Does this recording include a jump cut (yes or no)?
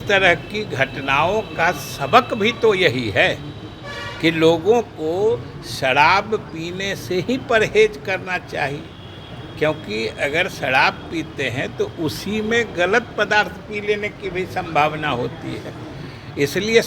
no